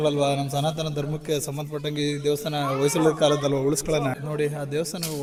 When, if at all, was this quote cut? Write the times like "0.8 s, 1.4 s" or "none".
none